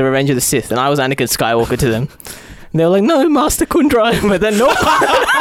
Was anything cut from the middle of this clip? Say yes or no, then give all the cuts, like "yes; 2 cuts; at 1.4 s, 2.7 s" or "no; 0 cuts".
no; 0 cuts